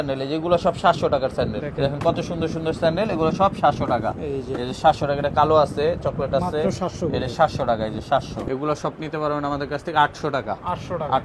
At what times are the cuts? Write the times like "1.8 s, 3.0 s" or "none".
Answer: 1.6 s, 8.5 s